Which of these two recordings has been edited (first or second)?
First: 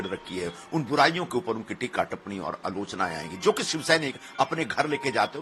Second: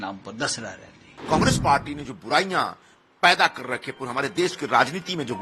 second